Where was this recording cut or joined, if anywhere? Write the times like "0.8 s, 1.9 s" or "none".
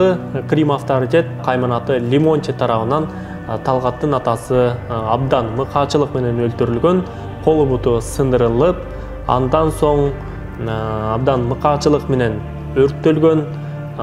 1.4 s